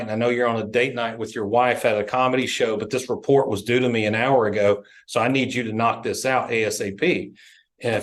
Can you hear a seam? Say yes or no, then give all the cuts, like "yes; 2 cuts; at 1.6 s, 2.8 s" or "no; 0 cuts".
no; 0 cuts